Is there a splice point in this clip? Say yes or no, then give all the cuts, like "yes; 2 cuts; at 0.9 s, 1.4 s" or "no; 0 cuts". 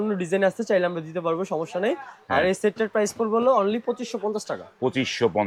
no; 0 cuts